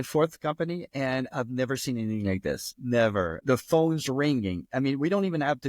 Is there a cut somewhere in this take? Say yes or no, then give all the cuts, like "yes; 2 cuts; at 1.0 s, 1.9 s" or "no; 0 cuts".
yes; 1 cut; at 3.4 s